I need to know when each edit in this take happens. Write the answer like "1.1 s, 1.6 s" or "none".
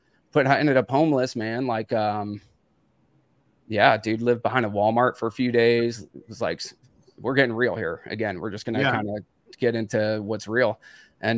none

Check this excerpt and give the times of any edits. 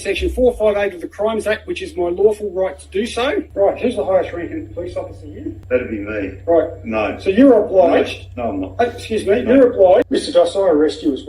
3.5 s, 5.5 s, 10.1 s

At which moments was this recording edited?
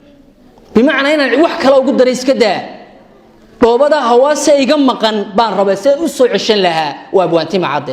none

